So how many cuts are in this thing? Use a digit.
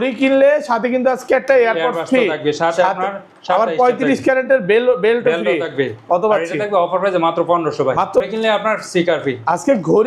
1